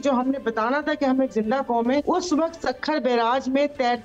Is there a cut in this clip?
yes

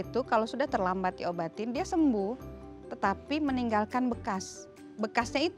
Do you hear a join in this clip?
no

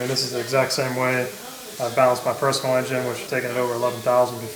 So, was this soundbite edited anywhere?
yes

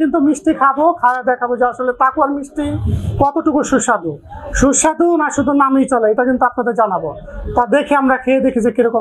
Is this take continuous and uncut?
yes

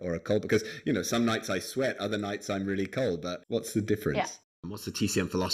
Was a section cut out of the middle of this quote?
yes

